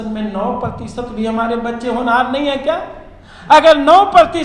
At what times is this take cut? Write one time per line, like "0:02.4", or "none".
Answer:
none

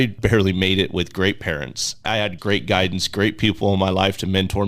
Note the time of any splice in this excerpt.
0:02.2

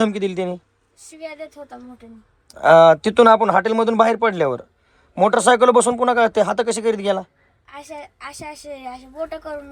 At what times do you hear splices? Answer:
none

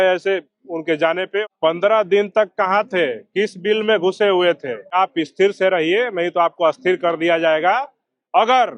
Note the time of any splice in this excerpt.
0:01.5
0:04.9

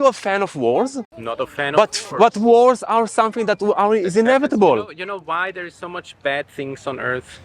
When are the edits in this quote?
0:01.2

